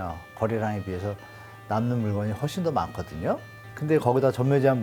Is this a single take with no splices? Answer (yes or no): yes